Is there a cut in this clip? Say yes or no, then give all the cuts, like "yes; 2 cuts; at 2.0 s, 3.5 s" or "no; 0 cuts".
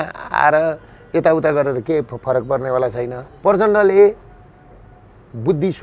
yes; 1 cut; at 3.2 s